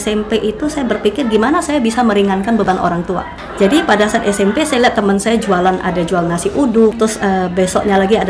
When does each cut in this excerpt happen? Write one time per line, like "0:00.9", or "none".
0:03.4
0:07.0